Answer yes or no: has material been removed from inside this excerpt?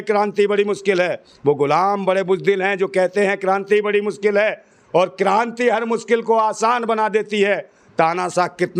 no